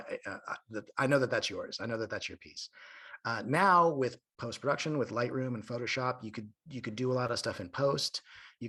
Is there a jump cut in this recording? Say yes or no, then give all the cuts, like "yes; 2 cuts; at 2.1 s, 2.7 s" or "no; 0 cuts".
no; 0 cuts